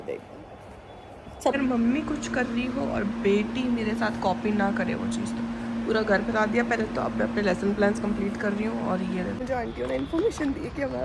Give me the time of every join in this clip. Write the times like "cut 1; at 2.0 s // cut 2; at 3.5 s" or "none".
cut 1; at 1.5 s // cut 2; at 9.4 s

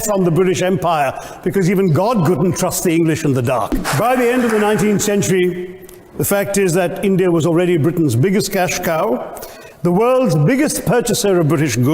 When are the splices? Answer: cut 1; at 3.8 s

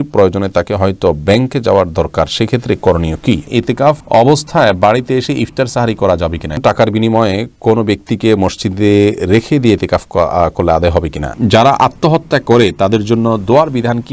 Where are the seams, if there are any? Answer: cut 1; at 3.9 s // cut 2; at 6.6 s // cut 3; at 11.3 s

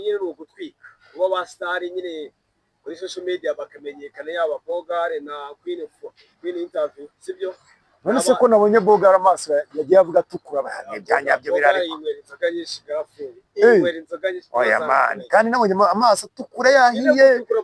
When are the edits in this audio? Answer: none

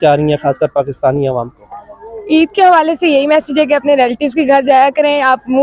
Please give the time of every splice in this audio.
none

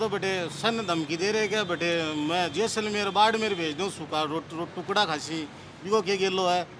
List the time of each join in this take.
none

